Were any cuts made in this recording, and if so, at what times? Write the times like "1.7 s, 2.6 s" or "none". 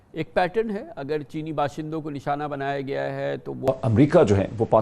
3.7 s